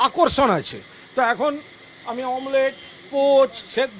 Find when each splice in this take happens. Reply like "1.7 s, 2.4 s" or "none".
none